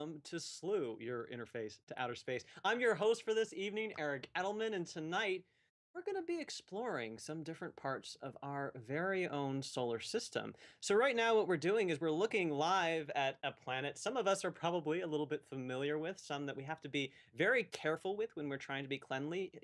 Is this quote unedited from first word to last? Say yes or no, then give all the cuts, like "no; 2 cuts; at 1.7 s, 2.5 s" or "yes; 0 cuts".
no; 1 cut; at 12.6 s